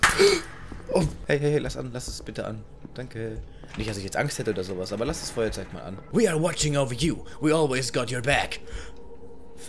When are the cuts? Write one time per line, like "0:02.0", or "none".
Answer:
0:01.2
0:06.1